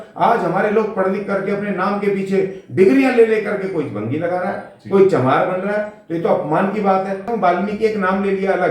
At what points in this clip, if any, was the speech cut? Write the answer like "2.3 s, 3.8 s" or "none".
7.3 s